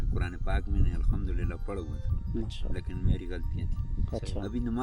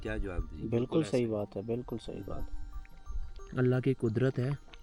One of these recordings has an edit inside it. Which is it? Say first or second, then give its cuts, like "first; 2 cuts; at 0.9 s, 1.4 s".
second; 1 cut; at 2.9 s